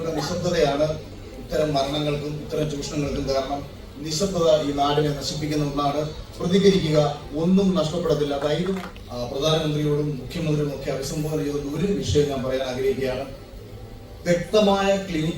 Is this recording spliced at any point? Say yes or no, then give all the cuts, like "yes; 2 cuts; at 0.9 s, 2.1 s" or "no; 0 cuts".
yes; 1 cut; at 8.8 s